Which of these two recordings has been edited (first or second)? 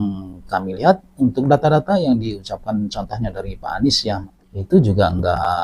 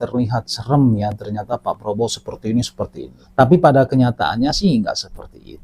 first